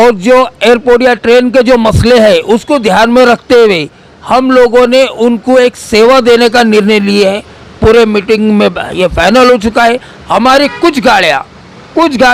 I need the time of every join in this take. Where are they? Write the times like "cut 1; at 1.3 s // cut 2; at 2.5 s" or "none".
none

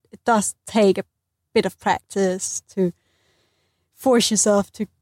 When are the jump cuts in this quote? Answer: none

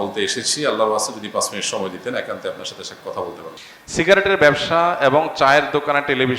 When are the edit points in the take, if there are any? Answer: cut 1; at 3.6 s

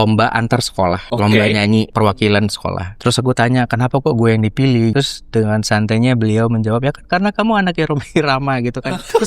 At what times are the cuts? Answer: cut 1; at 1.0 s // cut 2; at 1.9 s // cut 3; at 2.9 s // cut 4; at 4.9 s

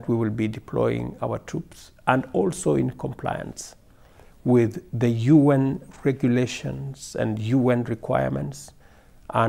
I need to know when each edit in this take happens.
none

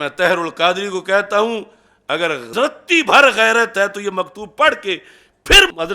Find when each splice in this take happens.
cut 1; at 2.4 s

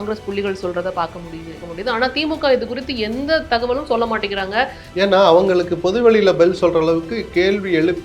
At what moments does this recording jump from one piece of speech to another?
cut 1; at 1.6 s // cut 2; at 4.8 s

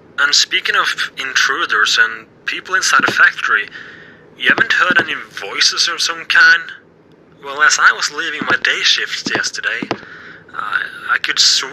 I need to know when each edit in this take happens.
none

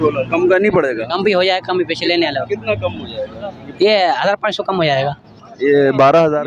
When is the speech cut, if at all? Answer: none

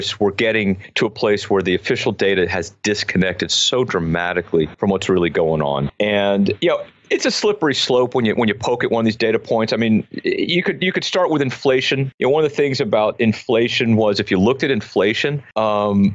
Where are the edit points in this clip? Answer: none

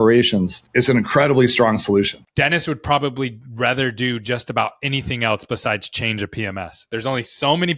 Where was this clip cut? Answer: cut 1; at 2.2 s // cut 2; at 6.9 s

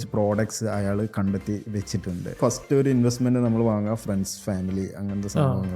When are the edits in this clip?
cut 1; at 2.4 s

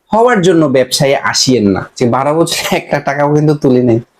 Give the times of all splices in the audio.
cut 1; at 1.9 s

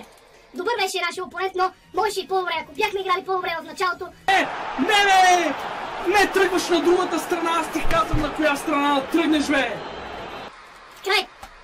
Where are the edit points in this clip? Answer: cut 1; at 4.3 s // cut 2; at 10.5 s

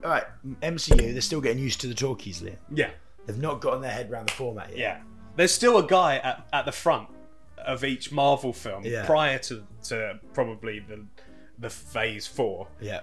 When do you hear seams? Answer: none

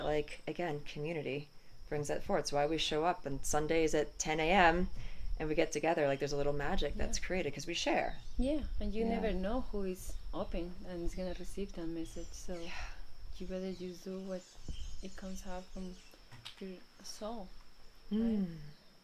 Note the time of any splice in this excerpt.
none

